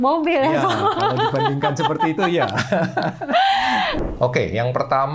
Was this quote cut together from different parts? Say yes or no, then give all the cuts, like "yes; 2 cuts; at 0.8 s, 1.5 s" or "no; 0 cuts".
yes; 1 cut; at 4.0 s